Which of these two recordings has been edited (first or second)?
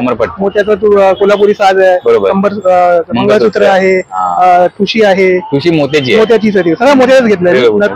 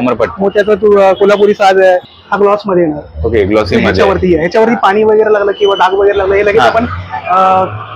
second